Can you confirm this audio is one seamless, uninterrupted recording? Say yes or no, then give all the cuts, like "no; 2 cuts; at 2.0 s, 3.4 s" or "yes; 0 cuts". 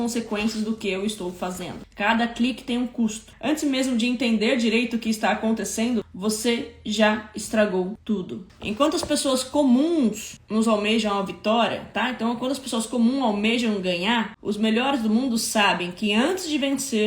no; 2 cuts; at 3.3 s, 8.4 s